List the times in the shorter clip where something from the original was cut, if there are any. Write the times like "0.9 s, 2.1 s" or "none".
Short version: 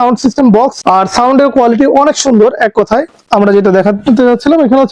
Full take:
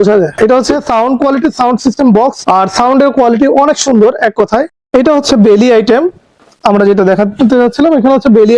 3.1 s